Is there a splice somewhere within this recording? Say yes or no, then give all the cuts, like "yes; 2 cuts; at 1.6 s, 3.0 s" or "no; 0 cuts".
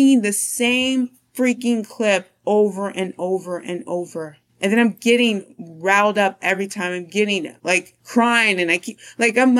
yes; 1 cut; at 7.5 s